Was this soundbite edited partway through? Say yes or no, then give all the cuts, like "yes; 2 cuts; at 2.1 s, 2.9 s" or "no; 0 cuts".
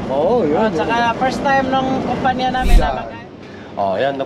yes; 1 cut; at 2.7 s